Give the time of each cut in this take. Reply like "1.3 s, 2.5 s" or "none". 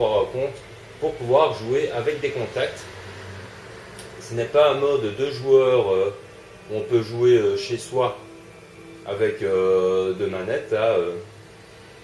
10.8 s

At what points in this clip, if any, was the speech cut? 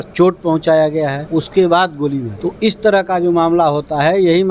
1.2 s, 2.3 s

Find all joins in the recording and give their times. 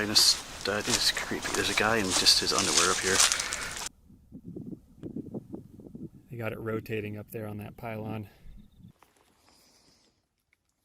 3.8 s, 8.9 s

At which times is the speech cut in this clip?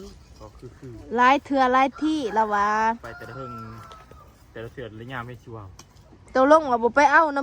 6.2 s

